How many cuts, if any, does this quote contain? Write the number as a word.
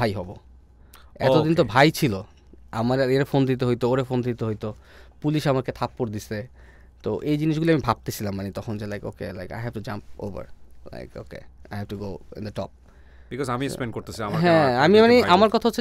zero